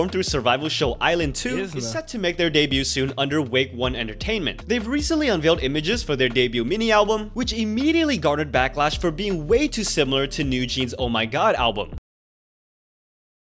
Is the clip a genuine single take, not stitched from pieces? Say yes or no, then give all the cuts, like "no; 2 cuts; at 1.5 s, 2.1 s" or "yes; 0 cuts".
no; 1 cut; at 4.6 s